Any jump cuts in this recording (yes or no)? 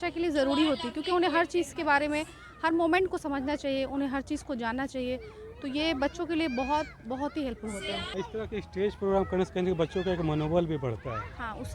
yes